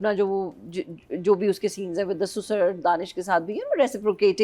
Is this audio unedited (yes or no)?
yes